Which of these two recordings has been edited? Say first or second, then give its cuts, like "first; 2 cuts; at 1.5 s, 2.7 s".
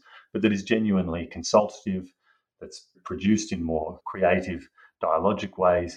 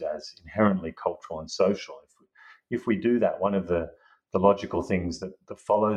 first; 2 cuts; at 3.0 s, 4.0 s